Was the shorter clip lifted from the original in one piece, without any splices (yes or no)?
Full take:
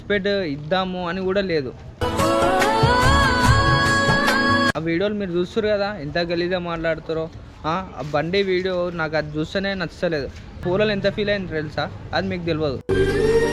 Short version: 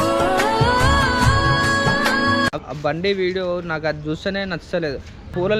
no